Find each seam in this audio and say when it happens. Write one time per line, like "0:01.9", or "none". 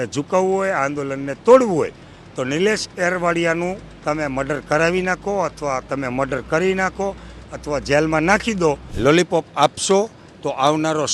0:08.9